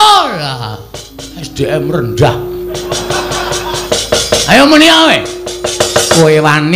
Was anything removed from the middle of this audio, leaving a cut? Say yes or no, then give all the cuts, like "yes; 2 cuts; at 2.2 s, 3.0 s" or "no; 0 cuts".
yes; 1 cut; at 3.8 s